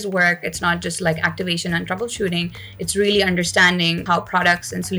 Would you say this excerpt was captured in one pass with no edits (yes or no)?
no